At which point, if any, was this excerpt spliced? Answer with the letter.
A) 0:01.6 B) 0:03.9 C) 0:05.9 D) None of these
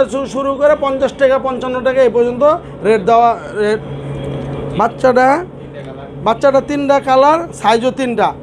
B